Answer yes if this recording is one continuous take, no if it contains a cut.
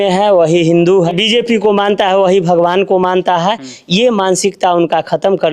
no